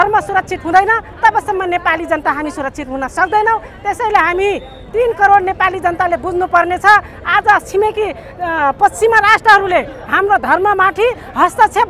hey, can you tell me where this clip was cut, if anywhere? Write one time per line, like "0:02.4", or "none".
none